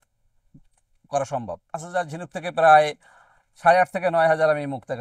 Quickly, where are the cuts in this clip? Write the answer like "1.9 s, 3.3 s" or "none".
1.9 s